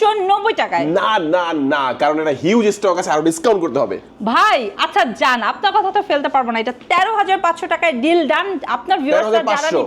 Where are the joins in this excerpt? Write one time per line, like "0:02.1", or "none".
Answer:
none